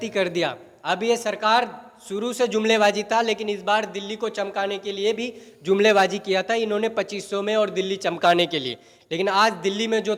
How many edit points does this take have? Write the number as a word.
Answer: zero